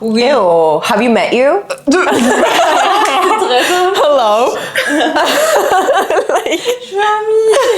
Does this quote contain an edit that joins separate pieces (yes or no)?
no